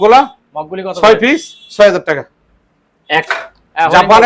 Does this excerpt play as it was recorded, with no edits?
no; 1 cut; at 3.3 s

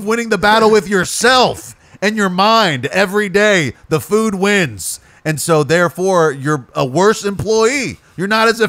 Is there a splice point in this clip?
no; 0 cuts

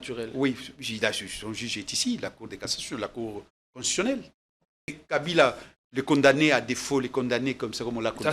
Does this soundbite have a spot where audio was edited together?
yes; 1 cut; at 5.0 s

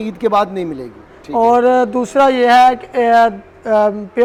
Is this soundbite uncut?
yes; 0 cuts

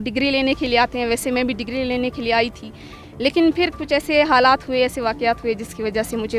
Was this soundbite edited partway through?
no; 0 cuts

